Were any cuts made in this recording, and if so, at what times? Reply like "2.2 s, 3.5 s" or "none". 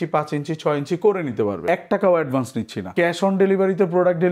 1.7 s, 2.9 s